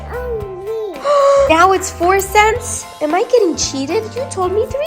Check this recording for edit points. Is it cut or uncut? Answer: cut